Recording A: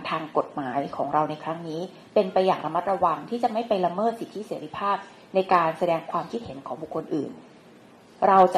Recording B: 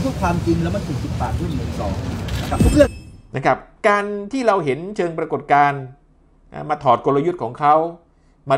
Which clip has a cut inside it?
B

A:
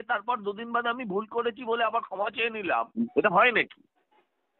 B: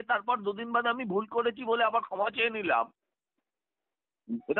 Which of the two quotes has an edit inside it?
A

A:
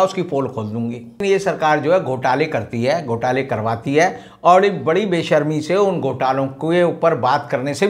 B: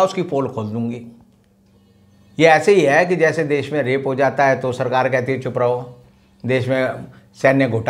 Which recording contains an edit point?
A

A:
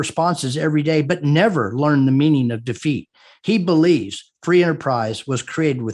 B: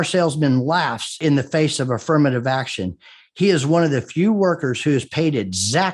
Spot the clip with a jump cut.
B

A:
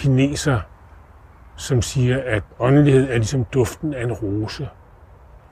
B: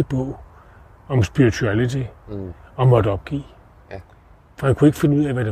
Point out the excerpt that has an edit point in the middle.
A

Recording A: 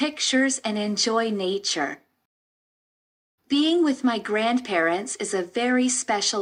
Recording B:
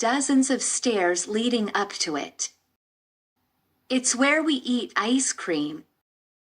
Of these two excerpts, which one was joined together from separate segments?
B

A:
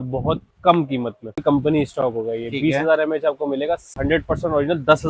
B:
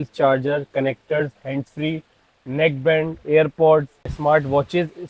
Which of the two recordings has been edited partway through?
A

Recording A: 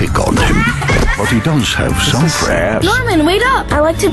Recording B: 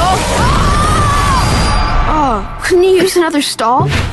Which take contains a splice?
A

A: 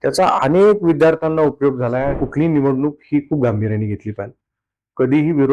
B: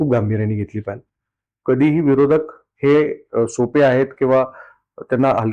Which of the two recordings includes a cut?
A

